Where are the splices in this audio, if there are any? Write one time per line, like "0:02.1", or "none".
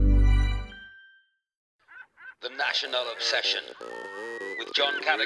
0:01.7